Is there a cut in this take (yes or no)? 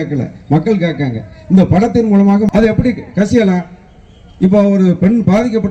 yes